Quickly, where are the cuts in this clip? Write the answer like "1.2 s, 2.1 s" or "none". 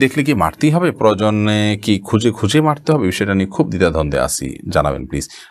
none

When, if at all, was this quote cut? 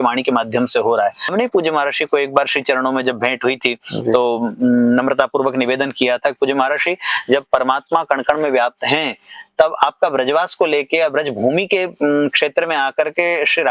1.3 s

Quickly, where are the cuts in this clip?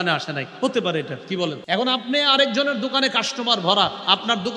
1.6 s

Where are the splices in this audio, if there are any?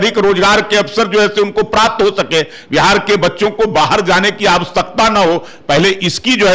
none

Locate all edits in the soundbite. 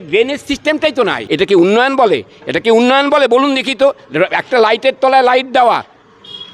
1.2 s

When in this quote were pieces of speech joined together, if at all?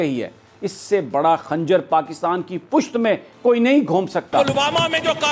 4.4 s

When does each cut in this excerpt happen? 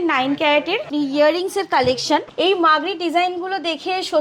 0.9 s, 2.3 s

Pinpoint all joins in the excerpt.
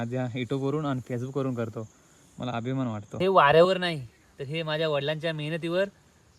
3.2 s

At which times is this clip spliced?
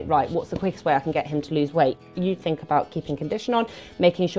2.0 s

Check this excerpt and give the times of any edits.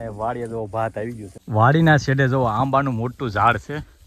1.3 s

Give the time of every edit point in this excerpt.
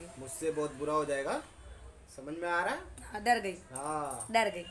none

